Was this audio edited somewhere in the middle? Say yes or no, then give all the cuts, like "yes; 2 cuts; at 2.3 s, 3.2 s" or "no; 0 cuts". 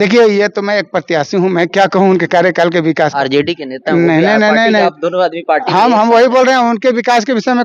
no; 0 cuts